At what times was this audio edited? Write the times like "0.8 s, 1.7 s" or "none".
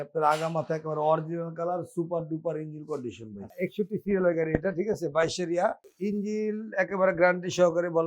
3.6 s